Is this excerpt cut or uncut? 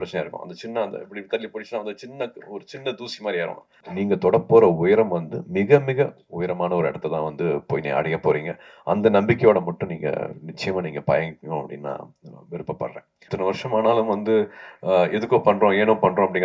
cut